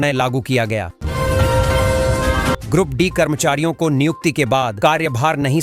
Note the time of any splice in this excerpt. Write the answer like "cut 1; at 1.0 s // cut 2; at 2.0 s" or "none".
cut 1; at 1.0 s // cut 2; at 2.6 s